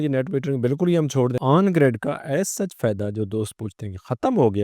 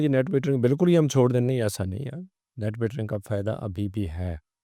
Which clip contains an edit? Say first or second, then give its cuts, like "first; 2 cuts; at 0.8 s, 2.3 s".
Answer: first; 1 cut; at 1.4 s